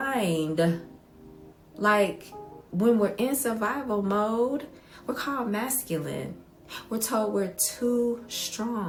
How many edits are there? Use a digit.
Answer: 0